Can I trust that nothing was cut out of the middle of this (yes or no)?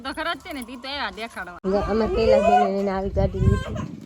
no